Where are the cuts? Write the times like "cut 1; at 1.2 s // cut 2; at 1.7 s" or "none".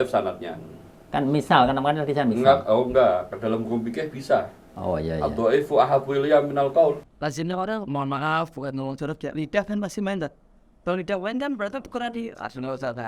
cut 1; at 7.1 s